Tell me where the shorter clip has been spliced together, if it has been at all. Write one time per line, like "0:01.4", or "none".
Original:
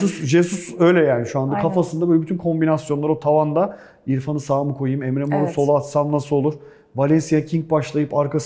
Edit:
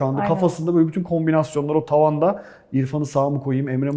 none